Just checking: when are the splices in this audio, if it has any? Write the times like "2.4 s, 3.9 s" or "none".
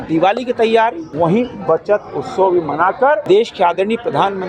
1.0 s, 3.2 s